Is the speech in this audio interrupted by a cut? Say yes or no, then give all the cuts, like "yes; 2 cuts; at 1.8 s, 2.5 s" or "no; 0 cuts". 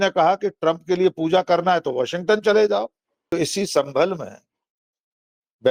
yes; 1 cut; at 3.3 s